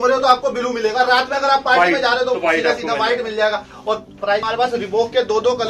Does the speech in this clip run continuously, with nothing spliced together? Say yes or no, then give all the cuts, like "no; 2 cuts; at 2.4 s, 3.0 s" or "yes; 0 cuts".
no; 1 cut; at 4.4 s